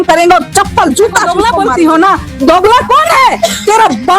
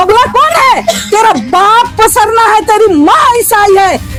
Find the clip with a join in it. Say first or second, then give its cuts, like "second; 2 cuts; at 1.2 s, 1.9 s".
first; 1 cut; at 1.3 s